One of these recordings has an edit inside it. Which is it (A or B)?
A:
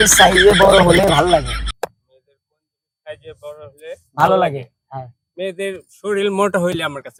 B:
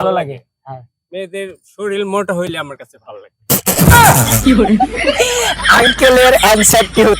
B